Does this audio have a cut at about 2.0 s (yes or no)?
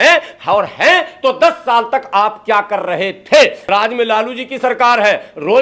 no